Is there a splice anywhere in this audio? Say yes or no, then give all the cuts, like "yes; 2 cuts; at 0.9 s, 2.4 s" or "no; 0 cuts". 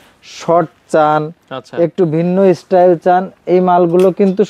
no; 0 cuts